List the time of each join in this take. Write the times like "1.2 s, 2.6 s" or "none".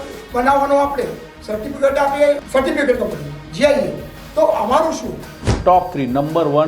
2.4 s, 5.5 s